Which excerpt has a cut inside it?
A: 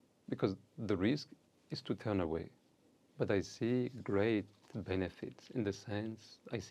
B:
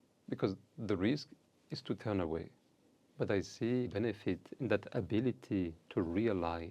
B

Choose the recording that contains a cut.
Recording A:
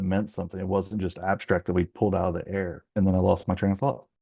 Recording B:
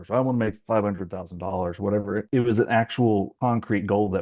B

